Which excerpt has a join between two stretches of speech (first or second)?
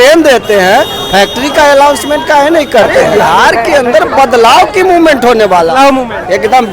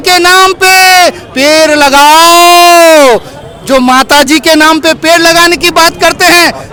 first